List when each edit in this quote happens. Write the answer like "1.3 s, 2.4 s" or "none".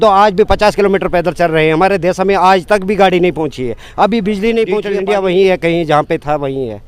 4.9 s